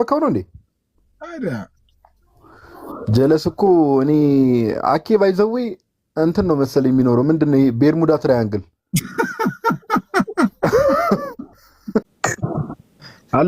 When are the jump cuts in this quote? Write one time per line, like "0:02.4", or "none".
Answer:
0:12.1